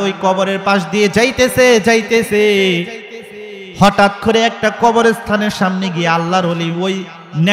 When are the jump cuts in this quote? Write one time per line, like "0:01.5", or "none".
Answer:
none